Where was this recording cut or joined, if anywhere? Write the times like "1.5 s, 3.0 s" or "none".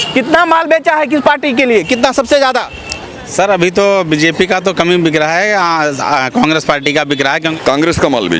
7.5 s

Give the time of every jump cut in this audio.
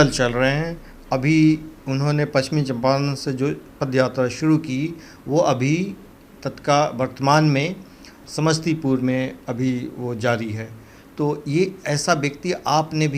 none

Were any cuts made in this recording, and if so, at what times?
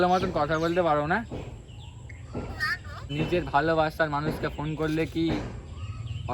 3.2 s

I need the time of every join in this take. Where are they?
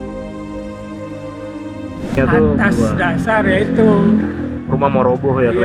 2.2 s

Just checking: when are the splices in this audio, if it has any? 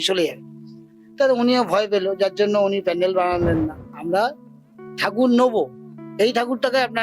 3.9 s

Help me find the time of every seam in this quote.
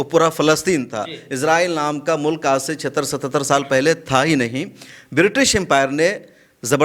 none

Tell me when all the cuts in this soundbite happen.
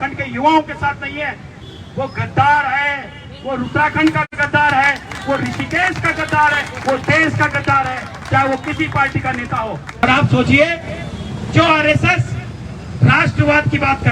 10.0 s

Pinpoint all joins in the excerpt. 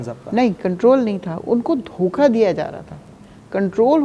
none

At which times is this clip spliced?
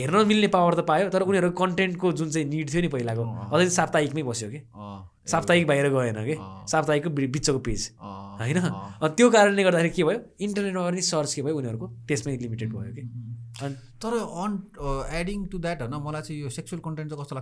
none

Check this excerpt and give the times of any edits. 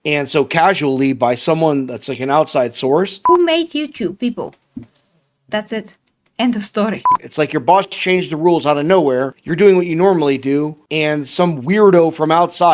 3.2 s, 7.1 s, 9.4 s, 10.8 s

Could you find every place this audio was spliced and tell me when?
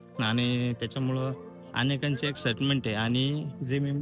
none

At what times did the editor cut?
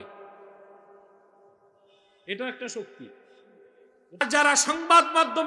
4.2 s

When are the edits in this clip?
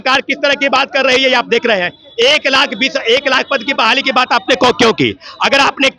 none

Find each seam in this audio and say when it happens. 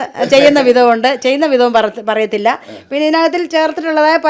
none

